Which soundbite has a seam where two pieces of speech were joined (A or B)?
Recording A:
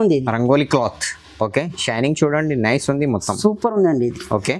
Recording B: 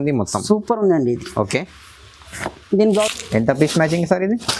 B